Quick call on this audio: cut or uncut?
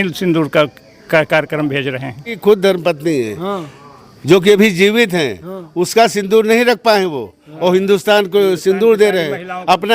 cut